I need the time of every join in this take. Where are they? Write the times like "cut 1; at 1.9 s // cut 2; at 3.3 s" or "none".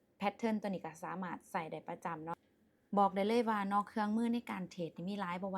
cut 1; at 2.5 s